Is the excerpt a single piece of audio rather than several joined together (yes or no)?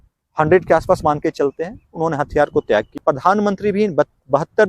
no